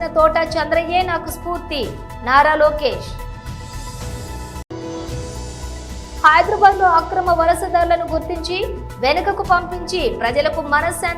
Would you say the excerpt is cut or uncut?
uncut